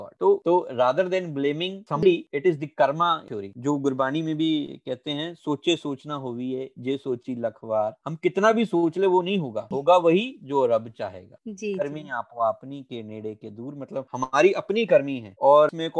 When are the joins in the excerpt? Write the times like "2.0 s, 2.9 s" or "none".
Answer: 2.0 s, 9.6 s